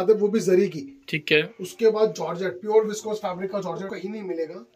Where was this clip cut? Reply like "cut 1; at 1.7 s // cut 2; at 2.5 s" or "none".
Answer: cut 1; at 3.8 s